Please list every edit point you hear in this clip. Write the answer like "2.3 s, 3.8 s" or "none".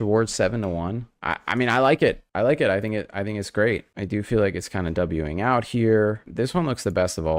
6.2 s